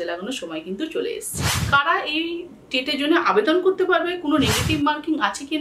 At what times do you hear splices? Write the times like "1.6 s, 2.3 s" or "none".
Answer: 1.6 s